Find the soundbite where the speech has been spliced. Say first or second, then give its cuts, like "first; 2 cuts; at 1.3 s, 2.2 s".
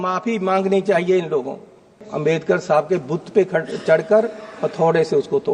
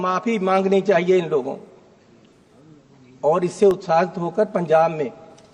first; 1 cut; at 2.0 s